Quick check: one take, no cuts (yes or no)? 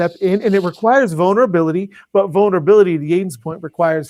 yes